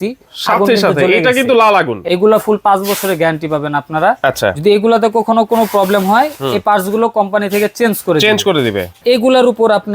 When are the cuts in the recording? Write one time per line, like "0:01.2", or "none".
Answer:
0:02.0
0:08.9